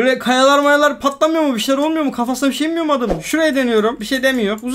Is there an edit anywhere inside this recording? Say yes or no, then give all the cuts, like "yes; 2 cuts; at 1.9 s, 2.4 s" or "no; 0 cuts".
yes; 1 cut; at 3.2 s